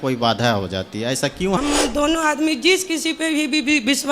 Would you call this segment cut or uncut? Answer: cut